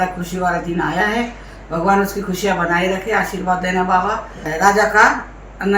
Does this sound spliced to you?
yes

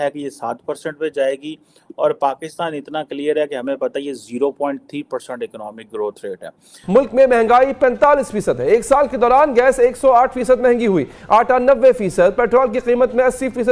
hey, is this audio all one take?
no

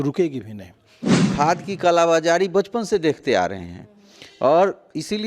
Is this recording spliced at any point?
yes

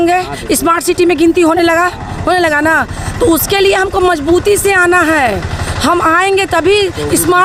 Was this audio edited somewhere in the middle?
no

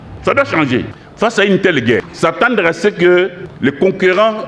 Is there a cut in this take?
yes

